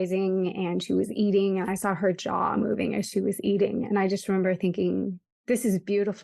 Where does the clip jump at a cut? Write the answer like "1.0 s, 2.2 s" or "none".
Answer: 5.3 s

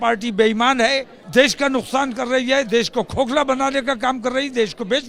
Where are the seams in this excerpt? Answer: 1.2 s

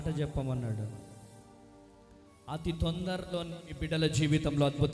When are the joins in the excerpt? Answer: none

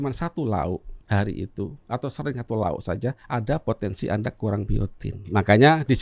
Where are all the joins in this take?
0.9 s, 1.8 s, 3.2 s, 5.3 s

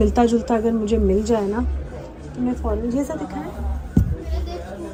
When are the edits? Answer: none

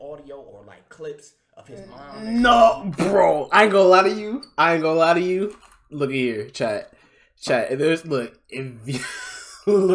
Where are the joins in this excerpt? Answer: none

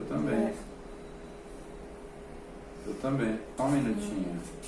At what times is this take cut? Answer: 3.5 s

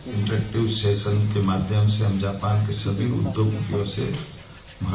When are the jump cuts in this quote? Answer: none

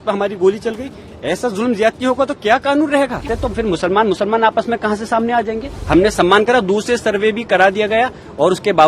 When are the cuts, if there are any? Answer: 3.3 s, 5.7 s

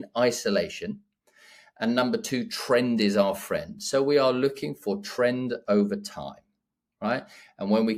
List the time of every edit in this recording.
none

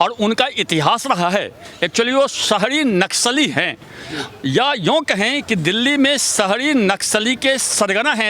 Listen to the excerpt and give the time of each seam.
none

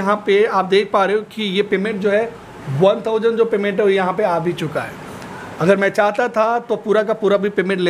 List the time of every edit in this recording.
none

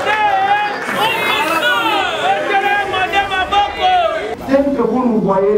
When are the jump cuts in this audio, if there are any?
4.3 s

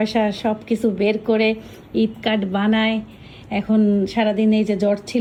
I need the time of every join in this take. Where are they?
none

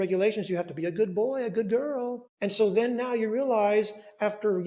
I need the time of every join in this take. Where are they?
2.2 s

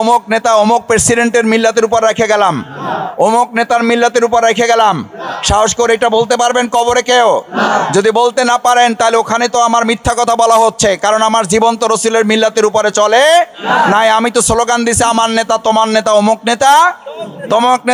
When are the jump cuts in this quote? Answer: none

